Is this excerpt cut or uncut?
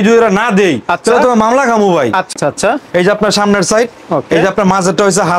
cut